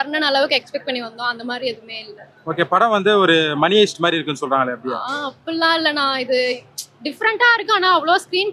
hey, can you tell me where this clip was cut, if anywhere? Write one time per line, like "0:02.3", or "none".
none